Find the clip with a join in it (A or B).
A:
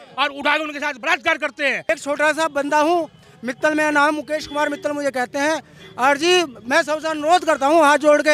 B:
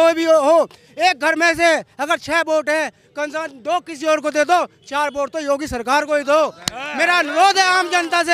A